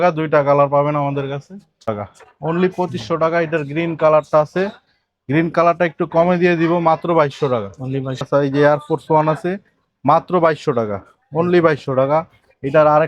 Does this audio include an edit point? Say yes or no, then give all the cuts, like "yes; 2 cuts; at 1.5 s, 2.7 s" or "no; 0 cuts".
yes; 2 cuts; at 1.9 s, 8.2 s